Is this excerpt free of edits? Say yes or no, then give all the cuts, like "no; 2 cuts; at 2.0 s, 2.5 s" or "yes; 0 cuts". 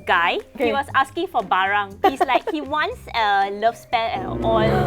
no; 1 cut; at 2.0 s